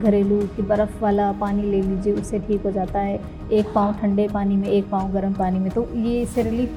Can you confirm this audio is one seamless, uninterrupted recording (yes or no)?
yes